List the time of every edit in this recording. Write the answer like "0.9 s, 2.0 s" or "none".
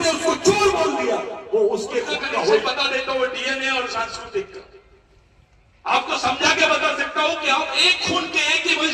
2.6 s